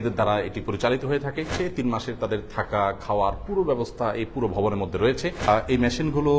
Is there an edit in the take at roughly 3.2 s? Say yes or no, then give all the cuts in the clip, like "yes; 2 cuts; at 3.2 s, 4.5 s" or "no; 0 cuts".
no; 2 cuts; at 1.5 s, 5.4 s